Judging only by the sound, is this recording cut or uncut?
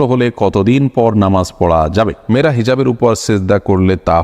cut